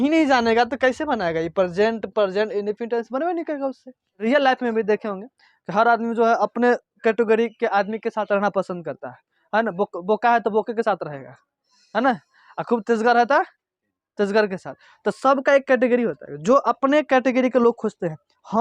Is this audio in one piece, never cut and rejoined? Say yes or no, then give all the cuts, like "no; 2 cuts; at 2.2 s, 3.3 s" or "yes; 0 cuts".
no; 1 cut; at 4.2 s